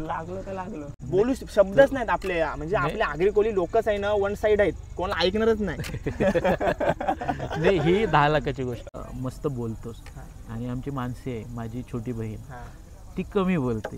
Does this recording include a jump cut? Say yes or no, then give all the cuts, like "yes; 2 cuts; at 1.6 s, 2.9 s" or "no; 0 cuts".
yes; 2 cuts; at 0.9 s, 9.0 s